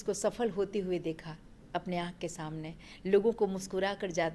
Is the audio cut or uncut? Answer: uncut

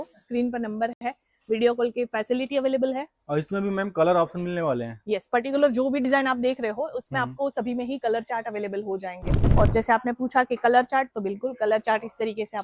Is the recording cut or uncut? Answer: cut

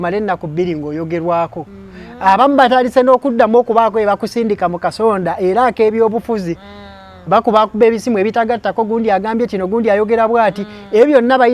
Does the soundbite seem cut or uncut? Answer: uncut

